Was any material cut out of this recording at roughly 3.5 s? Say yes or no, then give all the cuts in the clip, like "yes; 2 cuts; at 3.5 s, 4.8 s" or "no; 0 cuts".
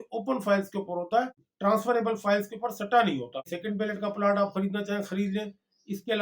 yes; 1 cut; at 3.5 s